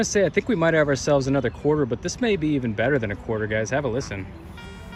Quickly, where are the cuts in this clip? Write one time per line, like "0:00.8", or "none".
none